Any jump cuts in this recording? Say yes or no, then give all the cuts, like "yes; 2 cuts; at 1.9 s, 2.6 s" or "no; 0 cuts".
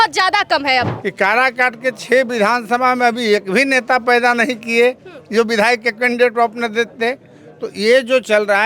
yes; 1 cut; at 0.9 s